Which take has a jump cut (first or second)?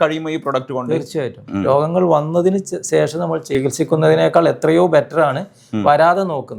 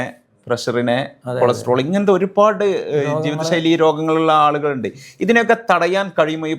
first